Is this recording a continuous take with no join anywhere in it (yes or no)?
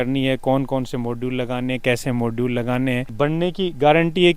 no